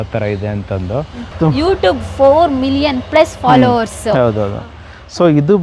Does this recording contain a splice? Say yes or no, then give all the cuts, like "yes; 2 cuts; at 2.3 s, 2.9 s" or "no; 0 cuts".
yes; 1 cut; at 1.3 s